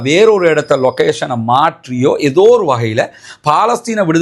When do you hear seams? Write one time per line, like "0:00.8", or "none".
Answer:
none